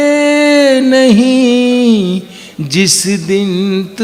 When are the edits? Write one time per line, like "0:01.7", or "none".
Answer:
none